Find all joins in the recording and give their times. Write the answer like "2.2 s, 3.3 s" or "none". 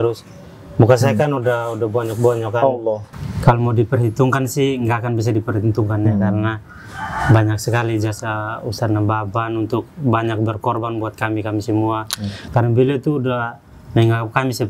3.1 s